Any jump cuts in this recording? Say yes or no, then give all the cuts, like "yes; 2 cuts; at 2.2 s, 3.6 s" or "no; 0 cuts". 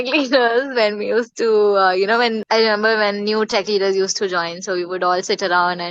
yes; 1 cut; at 2.4 s